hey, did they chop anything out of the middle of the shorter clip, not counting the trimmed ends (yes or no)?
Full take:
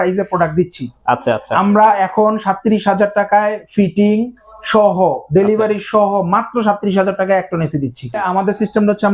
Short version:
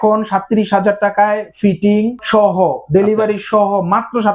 yes